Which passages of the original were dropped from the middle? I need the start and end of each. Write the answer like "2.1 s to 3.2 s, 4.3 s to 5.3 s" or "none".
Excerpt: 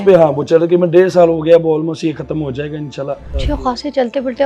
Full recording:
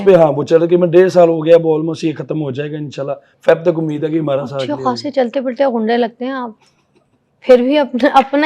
3.3 s to 4.5 s

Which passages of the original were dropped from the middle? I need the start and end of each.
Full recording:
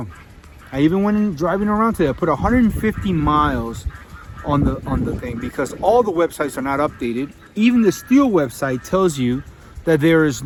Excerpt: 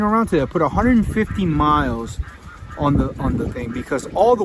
none

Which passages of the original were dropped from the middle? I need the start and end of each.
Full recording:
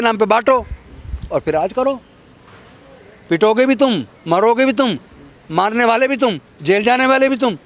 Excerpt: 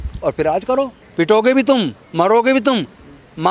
2.1 s to 3.1 s

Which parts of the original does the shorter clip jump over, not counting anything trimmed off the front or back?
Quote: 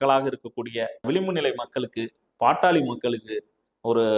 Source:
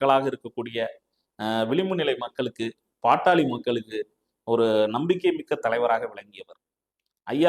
1.0 s to 1.7 s

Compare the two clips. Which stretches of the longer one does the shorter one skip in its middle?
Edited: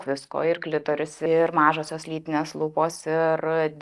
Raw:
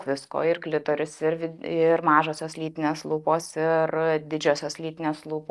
1.1 s to 1.6 s

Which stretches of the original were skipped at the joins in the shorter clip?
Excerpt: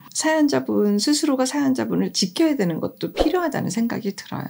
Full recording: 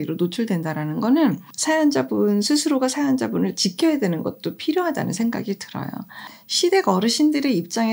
none

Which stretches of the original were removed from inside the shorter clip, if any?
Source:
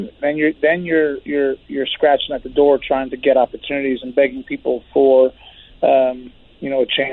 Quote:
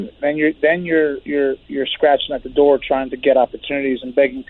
none

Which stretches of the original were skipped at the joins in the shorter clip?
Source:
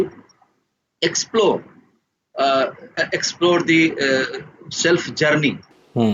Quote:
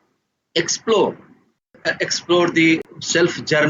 2.2 s to 2.8 s, 4.0 s to 4.5 s

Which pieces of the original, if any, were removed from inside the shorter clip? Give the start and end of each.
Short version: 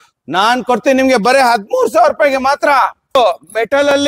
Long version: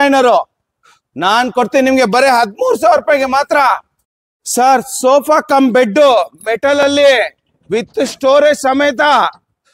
4.0 s to 6.1 s

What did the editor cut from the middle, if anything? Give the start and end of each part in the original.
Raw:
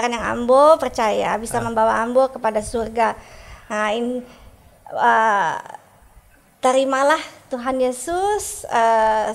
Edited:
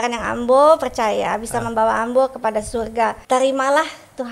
3.2 s to 6.5 s

